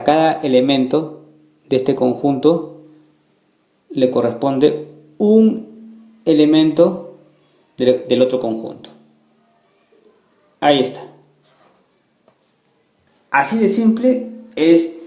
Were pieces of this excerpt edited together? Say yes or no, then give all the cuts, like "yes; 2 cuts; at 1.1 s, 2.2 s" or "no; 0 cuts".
yes; 1 cut; at 14.1 s